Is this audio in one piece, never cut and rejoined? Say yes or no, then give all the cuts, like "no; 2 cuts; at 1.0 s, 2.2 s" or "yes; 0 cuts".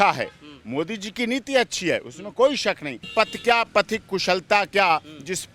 no; 1 cut; at 3.1 s